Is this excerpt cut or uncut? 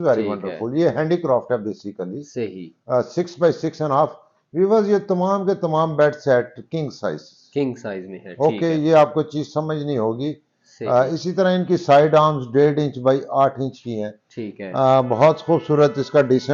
uncut